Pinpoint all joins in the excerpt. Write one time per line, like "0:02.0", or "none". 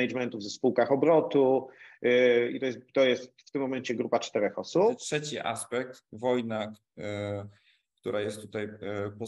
0:05.0